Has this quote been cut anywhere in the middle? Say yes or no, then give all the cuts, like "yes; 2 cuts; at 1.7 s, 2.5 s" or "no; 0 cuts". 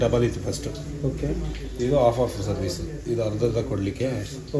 no; 0 cuts